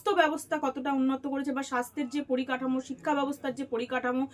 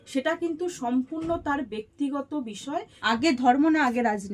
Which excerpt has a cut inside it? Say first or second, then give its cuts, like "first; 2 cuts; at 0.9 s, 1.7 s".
second; 1 cut; at 2.9 s